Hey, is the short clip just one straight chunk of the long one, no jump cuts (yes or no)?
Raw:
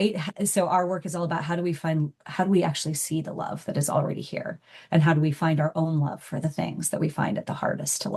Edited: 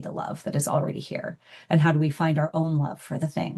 yes